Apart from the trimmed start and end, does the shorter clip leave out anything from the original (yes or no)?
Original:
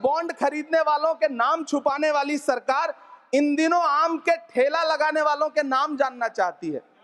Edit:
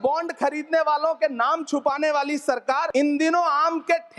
yes